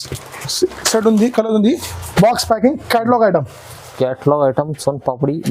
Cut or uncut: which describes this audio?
uncut